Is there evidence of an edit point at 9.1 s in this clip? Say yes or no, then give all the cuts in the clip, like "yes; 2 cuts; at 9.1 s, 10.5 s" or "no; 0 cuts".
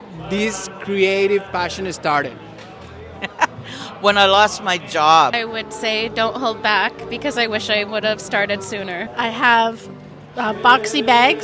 yes; 2 cuts; at 5.4 s, 9.1 s